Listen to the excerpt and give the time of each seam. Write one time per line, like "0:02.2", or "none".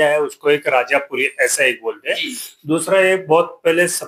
none